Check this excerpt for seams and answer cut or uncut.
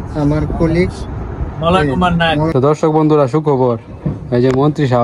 cut